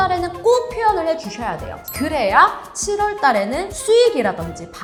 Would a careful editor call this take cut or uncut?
uncut